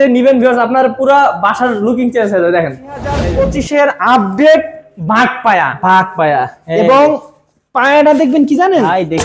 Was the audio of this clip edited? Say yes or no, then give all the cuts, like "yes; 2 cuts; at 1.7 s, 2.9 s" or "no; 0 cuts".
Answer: yes; 1 cut; at 3.2 s